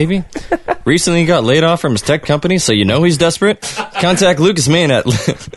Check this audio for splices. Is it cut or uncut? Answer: cut